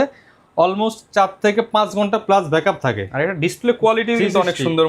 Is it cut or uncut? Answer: uncut